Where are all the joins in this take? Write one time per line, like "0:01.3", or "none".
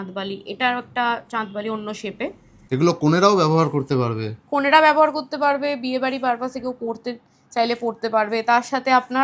0:02.5

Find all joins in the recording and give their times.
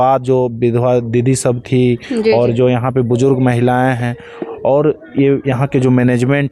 none

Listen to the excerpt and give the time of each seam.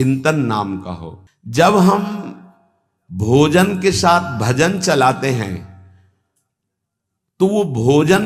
none

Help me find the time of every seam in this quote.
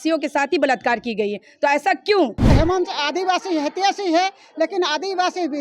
0:02.5

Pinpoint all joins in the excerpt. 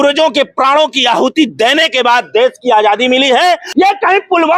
0:03.6

